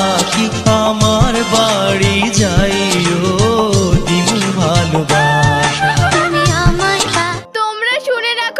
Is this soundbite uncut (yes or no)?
no